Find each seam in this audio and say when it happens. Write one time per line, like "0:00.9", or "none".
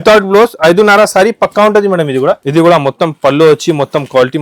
0:02.4